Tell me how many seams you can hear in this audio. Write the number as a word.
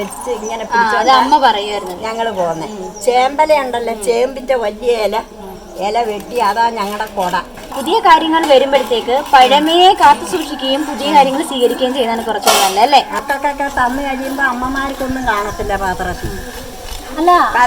two